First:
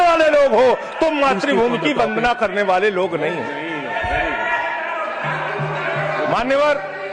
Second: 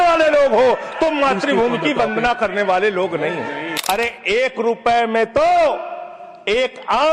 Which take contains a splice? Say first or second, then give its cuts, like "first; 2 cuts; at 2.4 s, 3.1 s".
second; 1 cut; at 3.7 s